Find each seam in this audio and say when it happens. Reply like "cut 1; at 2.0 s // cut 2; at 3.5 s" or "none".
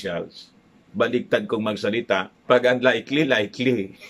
cut 1; at 2.3 s